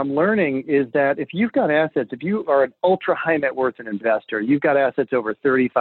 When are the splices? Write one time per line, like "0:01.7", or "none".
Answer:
0:03.9